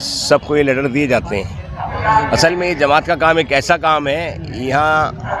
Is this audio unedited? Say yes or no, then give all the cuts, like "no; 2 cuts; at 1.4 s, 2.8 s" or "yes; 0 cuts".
yes; 0 cuts